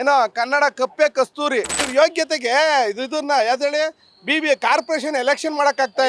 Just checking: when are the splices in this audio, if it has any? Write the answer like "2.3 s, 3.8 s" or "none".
1.8 s